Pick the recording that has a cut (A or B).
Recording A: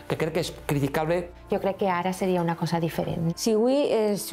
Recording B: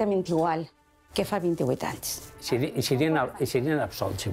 A